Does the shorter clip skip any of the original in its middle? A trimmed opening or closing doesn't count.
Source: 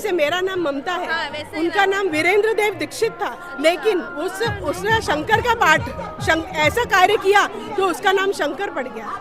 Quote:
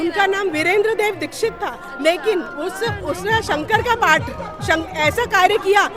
no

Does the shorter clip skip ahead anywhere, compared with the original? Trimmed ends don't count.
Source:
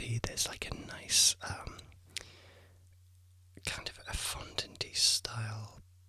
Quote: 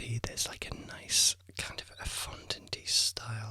yes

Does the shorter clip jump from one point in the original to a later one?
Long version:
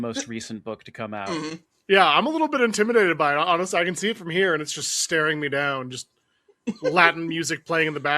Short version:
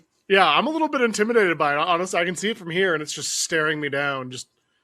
no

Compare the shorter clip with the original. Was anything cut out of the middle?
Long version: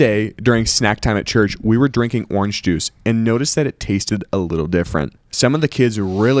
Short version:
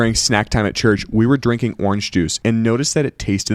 yes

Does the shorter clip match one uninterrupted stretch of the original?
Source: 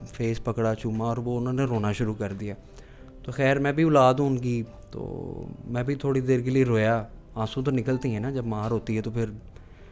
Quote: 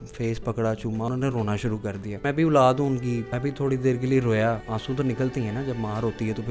no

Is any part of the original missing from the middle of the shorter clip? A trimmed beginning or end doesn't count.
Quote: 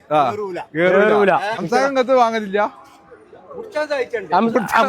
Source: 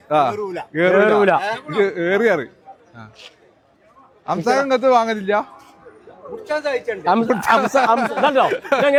yes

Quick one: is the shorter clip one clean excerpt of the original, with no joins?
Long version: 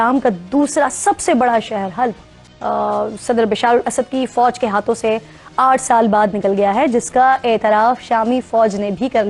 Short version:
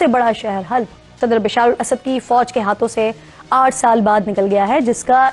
no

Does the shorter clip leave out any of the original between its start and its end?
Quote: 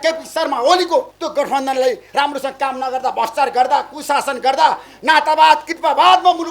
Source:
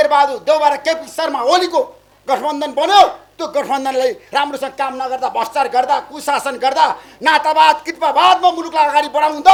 yes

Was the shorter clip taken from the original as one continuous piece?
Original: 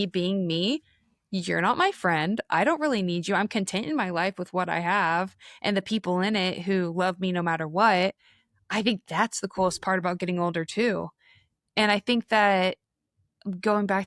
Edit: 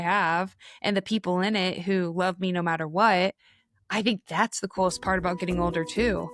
yes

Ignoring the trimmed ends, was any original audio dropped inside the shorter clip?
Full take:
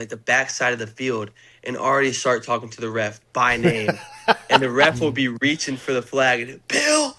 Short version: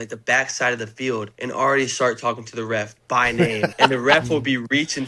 yes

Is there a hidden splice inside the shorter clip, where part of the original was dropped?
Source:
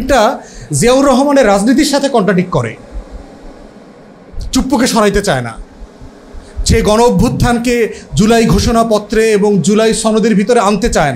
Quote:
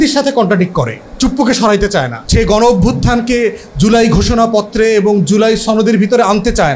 yes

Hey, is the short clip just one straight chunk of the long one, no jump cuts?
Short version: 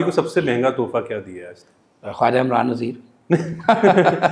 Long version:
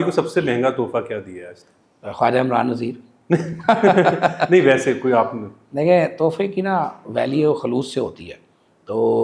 yes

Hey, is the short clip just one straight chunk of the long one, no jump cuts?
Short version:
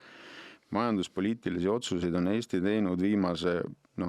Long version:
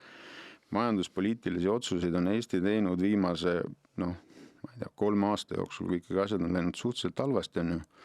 yes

